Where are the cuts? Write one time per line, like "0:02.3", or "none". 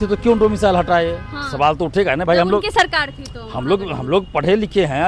none